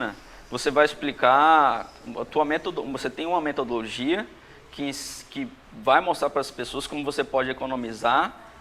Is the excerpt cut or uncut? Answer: uncut